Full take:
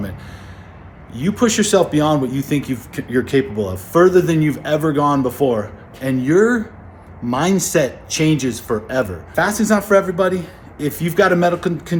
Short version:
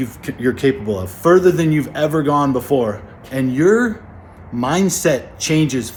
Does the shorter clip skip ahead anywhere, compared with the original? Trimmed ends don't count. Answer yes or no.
no